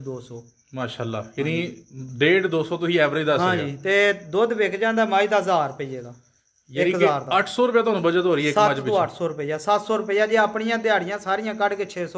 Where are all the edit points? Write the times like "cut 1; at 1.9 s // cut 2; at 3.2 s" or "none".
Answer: none